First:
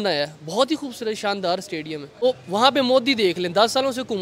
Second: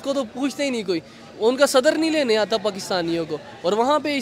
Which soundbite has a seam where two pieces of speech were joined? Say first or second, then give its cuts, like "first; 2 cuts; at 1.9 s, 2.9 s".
first; 1 cut; at 2.2 s